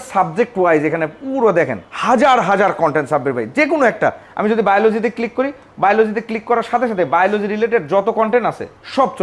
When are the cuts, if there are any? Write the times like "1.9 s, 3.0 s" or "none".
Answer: none